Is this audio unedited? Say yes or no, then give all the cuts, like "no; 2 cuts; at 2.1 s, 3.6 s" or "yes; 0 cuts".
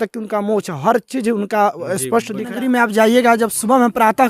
no; 1 cut; at 2.5 s